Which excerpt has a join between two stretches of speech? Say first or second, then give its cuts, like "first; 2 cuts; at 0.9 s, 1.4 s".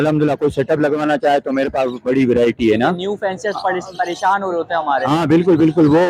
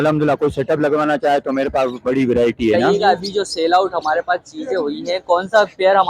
second; 1 cut; at 2.8 s